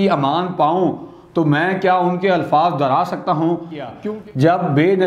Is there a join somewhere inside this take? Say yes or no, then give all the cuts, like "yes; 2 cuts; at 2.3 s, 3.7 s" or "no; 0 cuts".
yes; 1 cut; at 3.9 s